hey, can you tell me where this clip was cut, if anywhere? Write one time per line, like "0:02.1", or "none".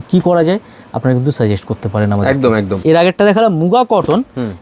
0:02.8